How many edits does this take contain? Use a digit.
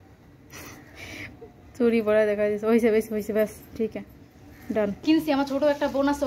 1